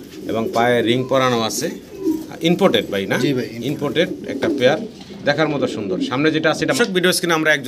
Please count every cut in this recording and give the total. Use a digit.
1